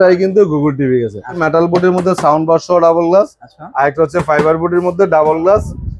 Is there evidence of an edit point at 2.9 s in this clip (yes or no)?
no